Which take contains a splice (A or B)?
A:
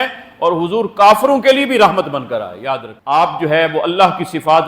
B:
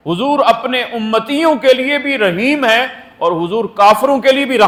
A